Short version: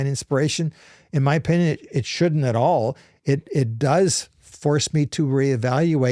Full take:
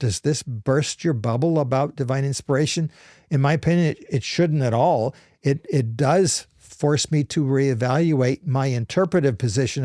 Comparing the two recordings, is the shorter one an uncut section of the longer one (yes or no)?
yes